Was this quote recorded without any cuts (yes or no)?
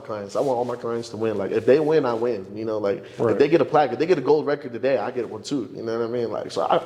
yes